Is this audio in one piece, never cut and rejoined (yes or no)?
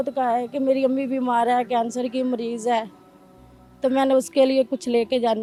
yes